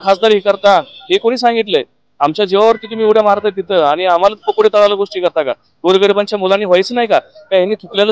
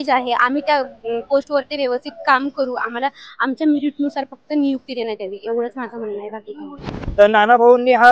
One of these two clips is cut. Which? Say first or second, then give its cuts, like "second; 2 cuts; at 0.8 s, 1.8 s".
second; 1 cut; at 7.0 s